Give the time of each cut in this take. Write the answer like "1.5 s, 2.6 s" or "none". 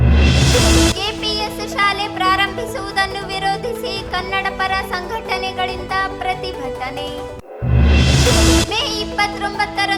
none